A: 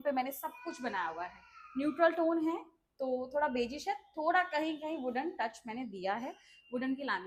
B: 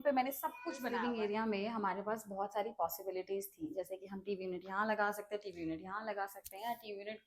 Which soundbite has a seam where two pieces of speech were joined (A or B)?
B